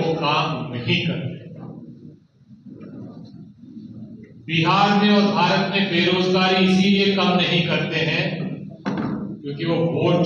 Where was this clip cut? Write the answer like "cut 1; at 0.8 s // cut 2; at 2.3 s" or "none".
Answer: none